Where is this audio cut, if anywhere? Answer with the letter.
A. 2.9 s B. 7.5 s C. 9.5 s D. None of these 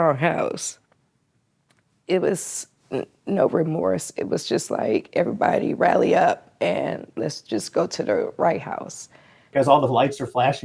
C